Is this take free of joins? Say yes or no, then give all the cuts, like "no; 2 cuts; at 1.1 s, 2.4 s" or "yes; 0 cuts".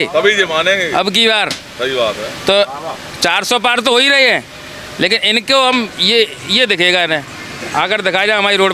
yes; 0 cuts